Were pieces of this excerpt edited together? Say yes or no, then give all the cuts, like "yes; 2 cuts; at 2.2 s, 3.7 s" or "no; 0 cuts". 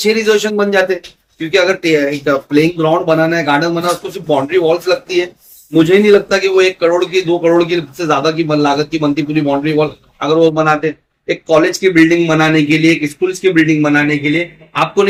no; 0 cuts